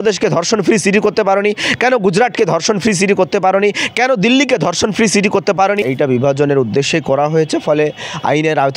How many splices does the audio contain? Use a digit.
2